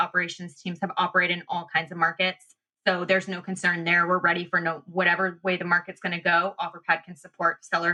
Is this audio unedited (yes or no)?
yes